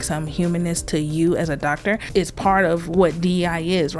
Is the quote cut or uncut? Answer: cut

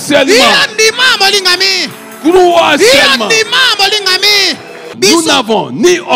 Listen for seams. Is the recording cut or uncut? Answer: cut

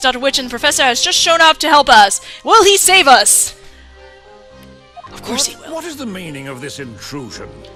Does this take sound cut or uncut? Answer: uncut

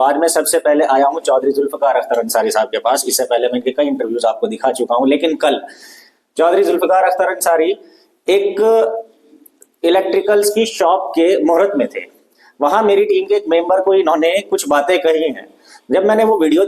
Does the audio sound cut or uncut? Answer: uncut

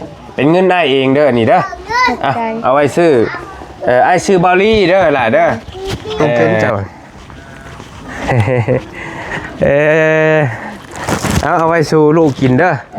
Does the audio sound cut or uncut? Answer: cut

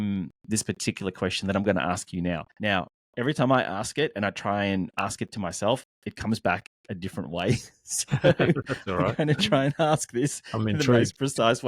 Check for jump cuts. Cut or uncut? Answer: cut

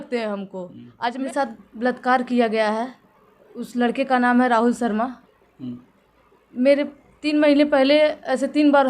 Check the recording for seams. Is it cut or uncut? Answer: cut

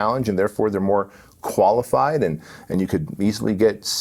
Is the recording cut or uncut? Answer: uncut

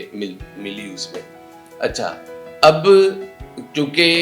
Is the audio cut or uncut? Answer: uncut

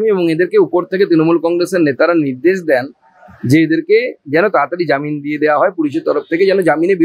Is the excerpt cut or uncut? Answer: uncut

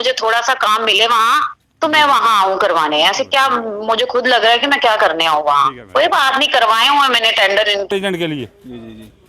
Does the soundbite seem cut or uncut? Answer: cut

